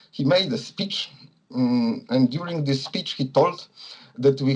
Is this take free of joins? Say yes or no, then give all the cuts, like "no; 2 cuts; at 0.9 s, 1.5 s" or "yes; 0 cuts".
yes; 0 cuts